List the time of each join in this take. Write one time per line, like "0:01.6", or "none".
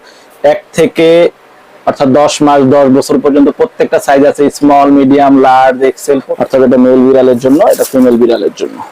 0:06.3